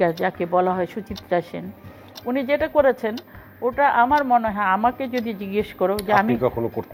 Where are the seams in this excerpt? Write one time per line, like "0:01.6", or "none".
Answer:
none